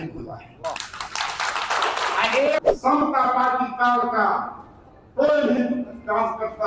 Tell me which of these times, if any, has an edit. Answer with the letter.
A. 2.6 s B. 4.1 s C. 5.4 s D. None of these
A